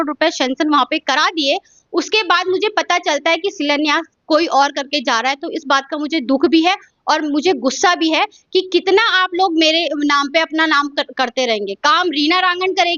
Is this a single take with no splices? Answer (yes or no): yes